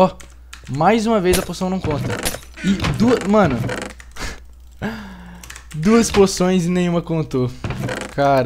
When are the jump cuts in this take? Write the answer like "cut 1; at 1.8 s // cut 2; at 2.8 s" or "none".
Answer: none

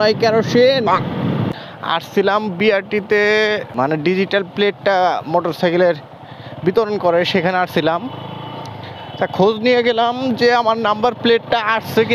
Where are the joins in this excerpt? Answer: cut 1; at 1.5 s // cut 2; at 3.7 s

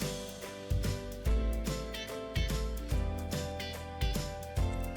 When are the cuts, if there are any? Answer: none

